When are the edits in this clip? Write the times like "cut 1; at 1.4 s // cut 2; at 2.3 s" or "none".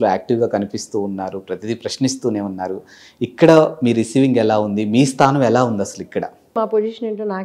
cut 1; at 6.5 s